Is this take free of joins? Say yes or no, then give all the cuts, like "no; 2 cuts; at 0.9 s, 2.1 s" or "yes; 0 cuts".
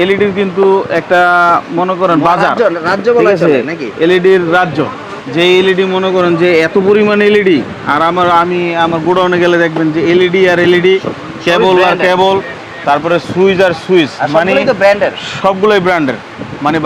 yes; 0 cuts